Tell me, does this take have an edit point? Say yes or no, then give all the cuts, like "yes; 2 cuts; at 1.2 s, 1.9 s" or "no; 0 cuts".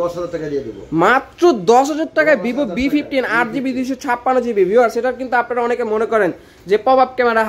no; 0 cuts